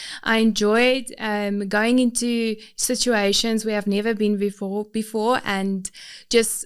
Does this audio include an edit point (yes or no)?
no